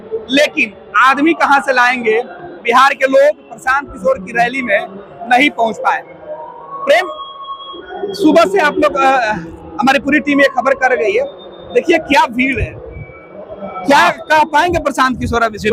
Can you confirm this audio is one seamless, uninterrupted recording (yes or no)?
yes